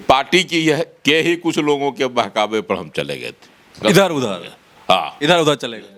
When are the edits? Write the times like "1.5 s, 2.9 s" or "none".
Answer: none